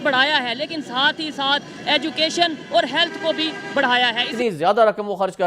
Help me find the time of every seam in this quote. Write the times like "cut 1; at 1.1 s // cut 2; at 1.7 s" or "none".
cut 1; at 4.3 s